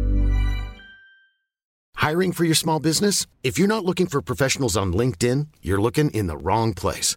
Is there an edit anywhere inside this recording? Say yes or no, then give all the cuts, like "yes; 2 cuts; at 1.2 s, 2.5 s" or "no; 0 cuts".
yes; 1 cut; at 1.8 s